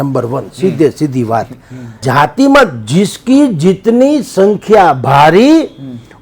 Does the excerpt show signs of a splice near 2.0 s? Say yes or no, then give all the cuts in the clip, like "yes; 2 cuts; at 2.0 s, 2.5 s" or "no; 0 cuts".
yes; 1 cut; at 2.0 s